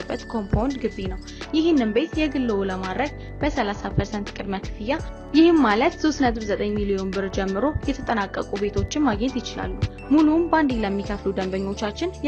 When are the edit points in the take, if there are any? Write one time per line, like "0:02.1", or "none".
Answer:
none